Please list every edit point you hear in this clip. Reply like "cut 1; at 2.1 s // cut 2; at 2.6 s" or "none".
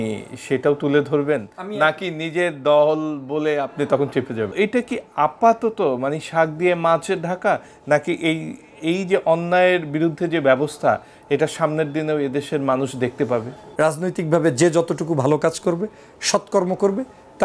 cut 1; at 4.5 s // cut 2; at 13.6 s

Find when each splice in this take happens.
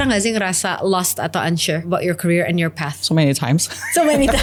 none

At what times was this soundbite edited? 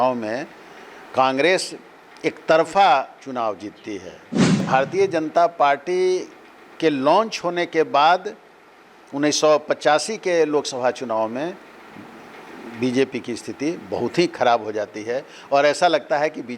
cut 1; at 4.7 s

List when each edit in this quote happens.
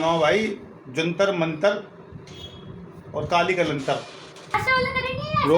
cut 1; at 4.5 s

